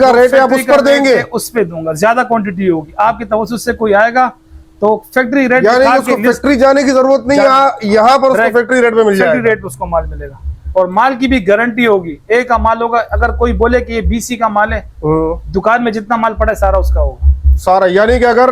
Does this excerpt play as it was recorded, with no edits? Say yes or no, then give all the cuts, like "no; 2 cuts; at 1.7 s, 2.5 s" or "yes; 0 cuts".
yes; 0 cuts